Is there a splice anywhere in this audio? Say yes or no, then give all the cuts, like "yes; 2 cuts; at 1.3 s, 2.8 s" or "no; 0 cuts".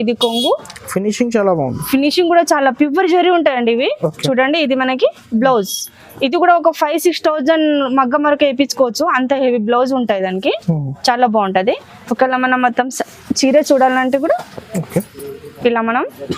no; 0 cuts